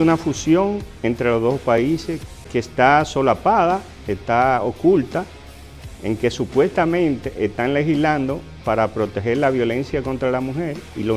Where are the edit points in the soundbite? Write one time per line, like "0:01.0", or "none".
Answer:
0:02.5